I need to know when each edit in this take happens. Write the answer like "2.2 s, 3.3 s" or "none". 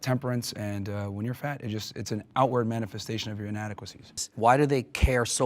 4.2 s

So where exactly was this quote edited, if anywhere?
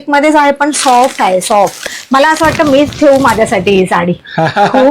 1.9 s

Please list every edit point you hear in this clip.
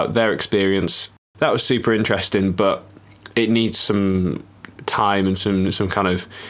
1.1 s

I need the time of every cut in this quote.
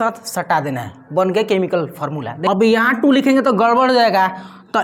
2.3 s

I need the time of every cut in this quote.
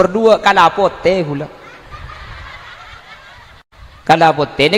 none

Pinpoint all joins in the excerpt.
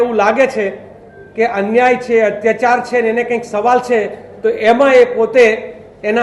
none

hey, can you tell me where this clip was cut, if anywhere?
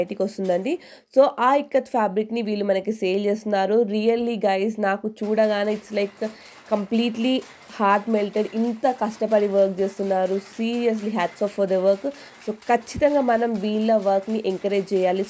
none

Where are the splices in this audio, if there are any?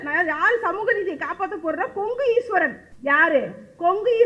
2.9 s

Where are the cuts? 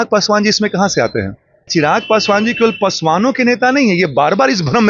1.7 s

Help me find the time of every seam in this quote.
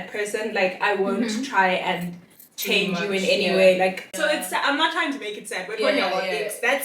4.1 s

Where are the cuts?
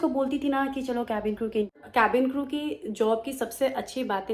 1.8 s

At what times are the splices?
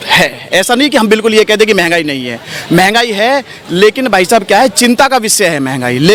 none

